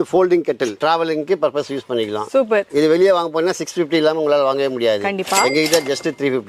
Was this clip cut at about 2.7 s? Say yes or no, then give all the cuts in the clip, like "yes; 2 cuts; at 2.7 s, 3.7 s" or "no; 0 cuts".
no; 0 cuts